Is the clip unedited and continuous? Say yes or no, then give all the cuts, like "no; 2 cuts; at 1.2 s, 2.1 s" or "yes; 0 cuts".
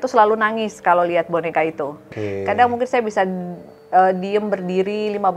no; 1 cut; at 2.1 s